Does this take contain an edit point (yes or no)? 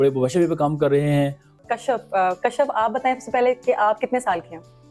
yes